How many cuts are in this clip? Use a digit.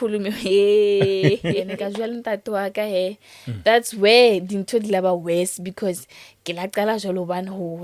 1